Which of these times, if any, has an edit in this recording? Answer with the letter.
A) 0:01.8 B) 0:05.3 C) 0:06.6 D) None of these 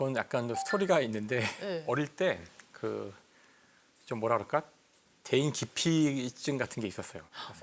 A